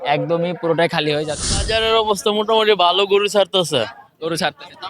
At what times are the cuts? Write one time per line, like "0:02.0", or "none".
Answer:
0:01.5